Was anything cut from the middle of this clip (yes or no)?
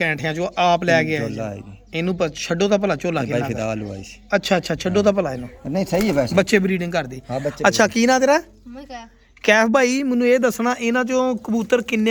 no